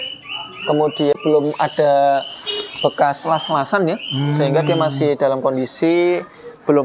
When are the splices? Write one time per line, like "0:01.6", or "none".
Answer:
0:01.1